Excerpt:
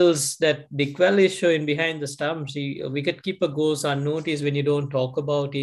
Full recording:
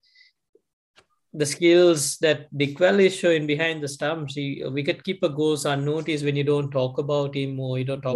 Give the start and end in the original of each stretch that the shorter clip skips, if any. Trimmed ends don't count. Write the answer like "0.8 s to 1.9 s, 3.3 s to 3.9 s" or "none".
none